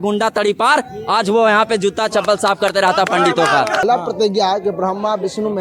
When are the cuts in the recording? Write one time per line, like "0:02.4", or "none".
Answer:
0:03.8